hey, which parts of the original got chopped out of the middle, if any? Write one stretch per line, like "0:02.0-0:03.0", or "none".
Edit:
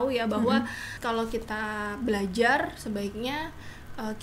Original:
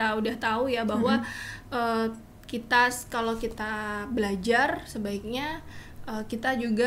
0:01.5-0:03.0